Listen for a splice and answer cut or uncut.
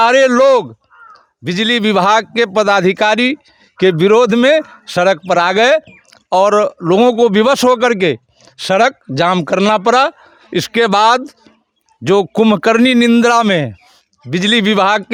uncut